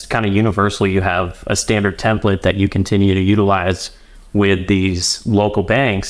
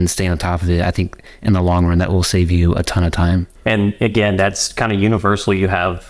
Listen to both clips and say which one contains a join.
second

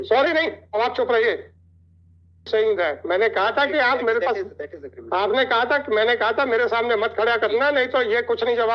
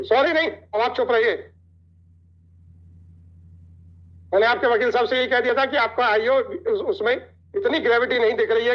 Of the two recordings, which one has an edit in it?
first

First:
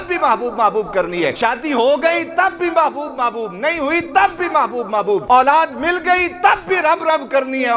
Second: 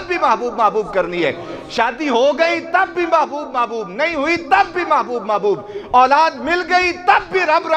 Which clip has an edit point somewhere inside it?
first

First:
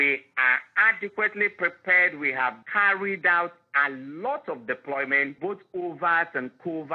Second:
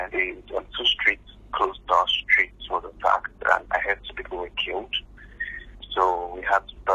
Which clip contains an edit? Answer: first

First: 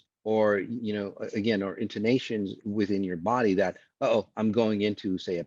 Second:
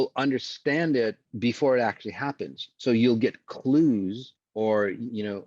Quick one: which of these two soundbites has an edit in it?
second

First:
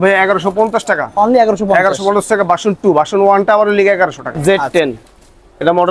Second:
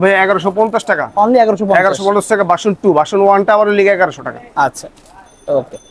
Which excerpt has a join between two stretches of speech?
first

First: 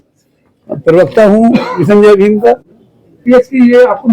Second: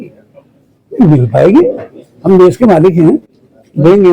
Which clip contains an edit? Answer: first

